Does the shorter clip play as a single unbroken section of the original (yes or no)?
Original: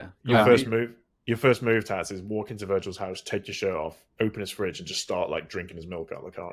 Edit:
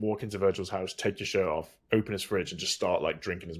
yes